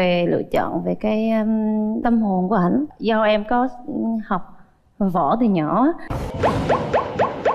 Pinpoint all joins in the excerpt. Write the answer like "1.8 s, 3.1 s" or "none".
2.9 s